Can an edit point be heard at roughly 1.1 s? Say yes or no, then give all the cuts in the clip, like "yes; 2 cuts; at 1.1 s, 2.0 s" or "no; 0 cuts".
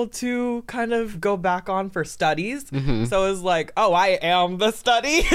yes; 1 cut; at 1.1 s